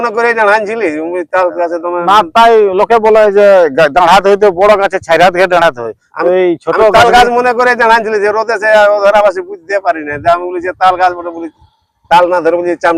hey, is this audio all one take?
yes; 0 cuts

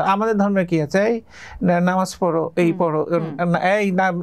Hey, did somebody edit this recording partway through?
no; 0 cuts

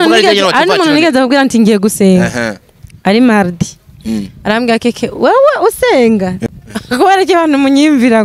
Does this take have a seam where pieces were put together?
yes; 1 cut; at 6.4 s

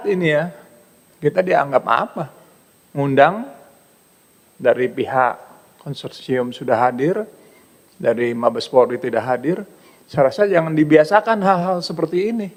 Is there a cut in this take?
no; 0 cuts

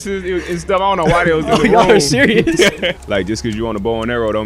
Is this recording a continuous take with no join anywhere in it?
no; 1 cut; at 2.7 s

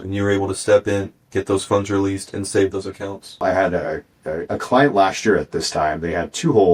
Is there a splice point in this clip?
yes; 1 cut; at 3.4 s

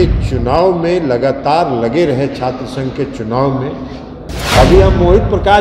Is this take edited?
yes; 1 cut; at 4.3 s

